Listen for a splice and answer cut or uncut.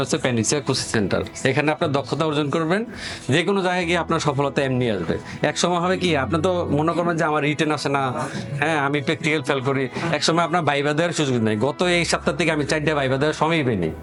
uncut